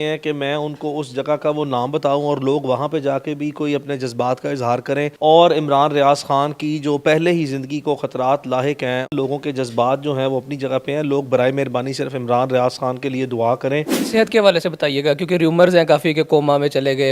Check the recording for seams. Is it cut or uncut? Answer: cut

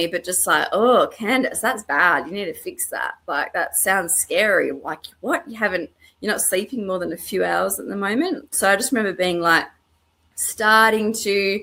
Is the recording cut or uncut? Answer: uncut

